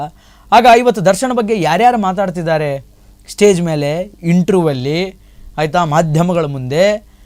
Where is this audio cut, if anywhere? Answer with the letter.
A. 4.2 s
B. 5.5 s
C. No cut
C